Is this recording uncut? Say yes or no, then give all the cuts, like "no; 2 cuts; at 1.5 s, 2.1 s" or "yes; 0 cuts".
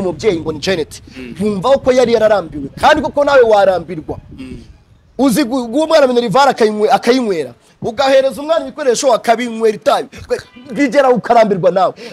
yes; 0 cuts